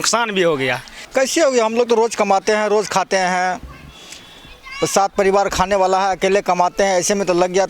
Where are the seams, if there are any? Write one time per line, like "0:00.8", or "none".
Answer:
0:00.9